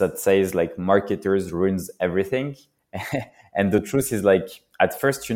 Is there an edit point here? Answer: no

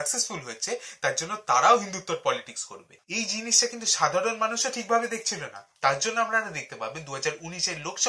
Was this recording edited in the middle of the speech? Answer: yes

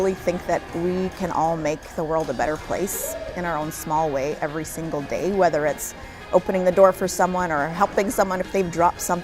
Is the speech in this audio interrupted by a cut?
no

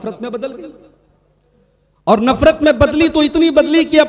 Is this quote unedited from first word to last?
yes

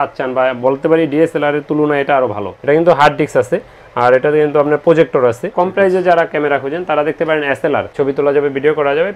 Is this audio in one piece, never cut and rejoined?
no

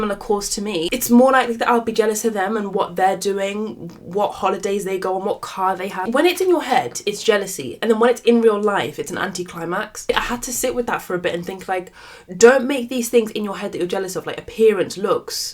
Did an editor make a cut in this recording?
yes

